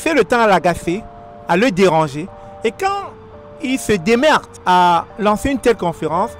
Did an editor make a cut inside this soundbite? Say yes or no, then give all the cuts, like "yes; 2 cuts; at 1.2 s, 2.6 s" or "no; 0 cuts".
yes; 1 cut; at 4.5 s